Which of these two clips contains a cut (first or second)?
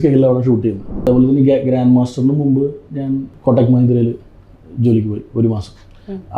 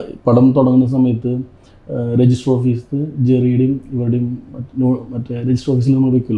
first